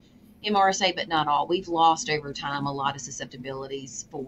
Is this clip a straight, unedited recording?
yes; 0 cuts

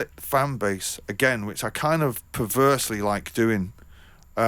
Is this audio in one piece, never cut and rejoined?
yes; 0 cuts

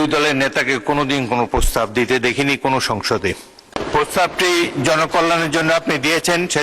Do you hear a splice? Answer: yes; 1 cut; at 3.8 s

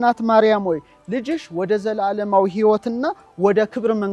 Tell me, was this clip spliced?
no; 0 cuts

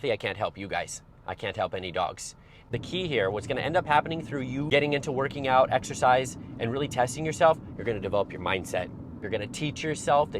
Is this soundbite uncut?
no; 3 cuts; at 2.6 s, 4.7 s, 9.2 s

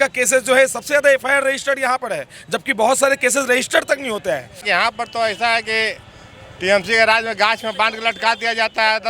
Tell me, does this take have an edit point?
yes; 1 cut; at 4.6 s

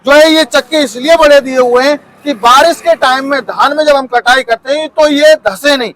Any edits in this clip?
no; 0 cuts

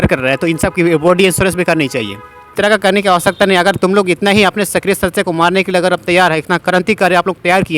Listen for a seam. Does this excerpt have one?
yes; 1 cut; at 2.5 s

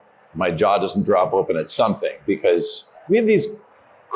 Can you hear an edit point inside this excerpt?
yes; 1 cut; at 3.0 s

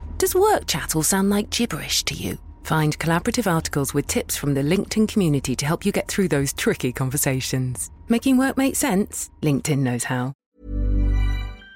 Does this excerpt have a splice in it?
yes; 1 cut; at 10.4 s

